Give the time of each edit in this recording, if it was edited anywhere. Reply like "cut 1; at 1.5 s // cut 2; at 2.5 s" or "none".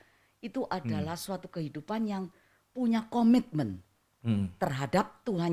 none